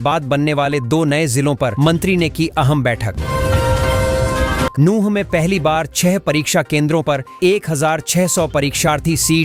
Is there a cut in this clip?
no; 0 cuts

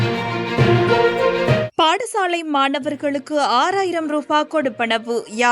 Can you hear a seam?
yes; 1 cut; at 1.7 s

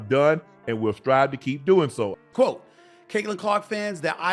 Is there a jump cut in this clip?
yes; 1 cut; at 2.2 s

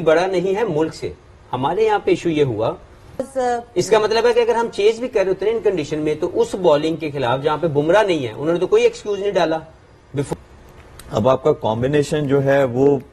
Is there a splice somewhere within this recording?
yes; 2 cuts; at 3.3 s, 10.3 s

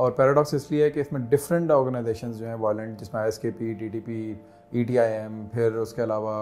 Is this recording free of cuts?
yes; 0 cuts

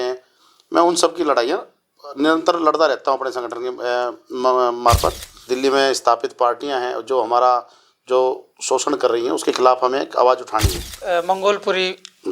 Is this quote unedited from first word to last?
no; 2 cuts; at 5.4 s, 10.9 s

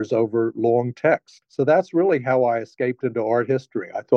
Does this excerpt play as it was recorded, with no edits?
yes; 0 cuts

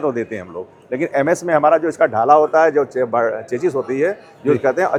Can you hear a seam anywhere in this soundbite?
no; 0 cuts

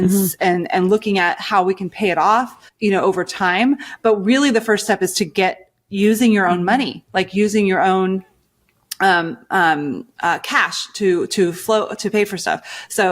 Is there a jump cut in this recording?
yes; 1 cut; at 2.6 s

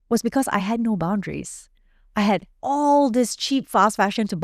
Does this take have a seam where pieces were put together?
no; 0 cuts

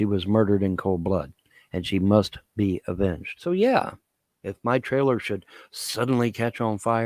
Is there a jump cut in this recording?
yes; 1 cut; at 3.3 s

